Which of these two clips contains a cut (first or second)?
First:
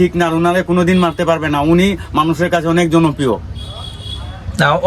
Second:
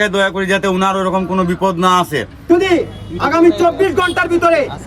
second